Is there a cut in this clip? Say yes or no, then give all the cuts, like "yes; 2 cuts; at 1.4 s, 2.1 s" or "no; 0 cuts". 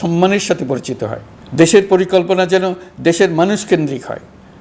no; 0 cuts